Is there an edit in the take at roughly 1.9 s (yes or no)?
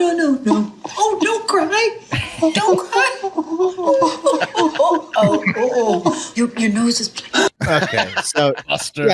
no